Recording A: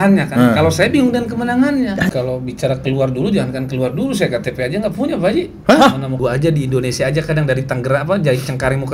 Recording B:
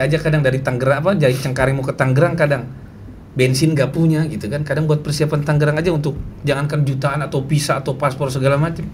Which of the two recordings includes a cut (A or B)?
A